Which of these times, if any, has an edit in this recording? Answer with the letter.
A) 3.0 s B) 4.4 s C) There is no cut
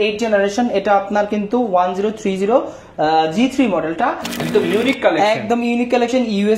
B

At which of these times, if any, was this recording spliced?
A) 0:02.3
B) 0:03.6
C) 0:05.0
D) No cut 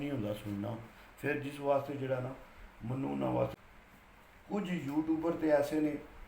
B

